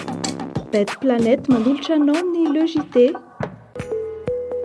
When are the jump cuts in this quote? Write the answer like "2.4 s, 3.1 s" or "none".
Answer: 3.6 s